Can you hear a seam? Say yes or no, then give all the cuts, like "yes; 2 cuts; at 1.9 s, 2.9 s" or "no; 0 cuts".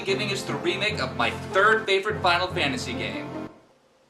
yes; 1 cut; at 1.5 s